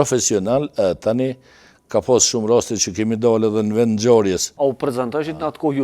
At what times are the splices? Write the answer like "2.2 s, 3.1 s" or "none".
4.5 s